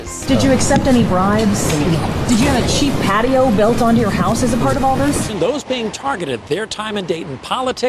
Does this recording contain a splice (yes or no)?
yes